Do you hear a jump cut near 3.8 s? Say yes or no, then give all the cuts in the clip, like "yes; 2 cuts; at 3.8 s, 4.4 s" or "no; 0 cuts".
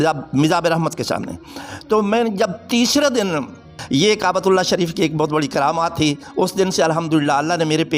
yes; 1 cut; at 3.8 s